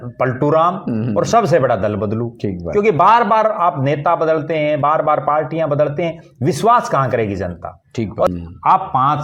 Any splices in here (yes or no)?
yes